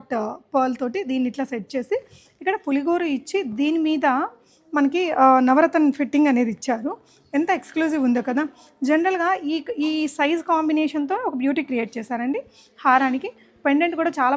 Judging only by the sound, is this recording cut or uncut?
uncut